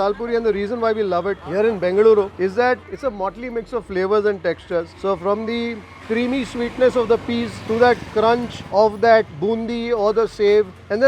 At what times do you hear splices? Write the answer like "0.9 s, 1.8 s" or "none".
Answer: 1.4 s, 2.7 s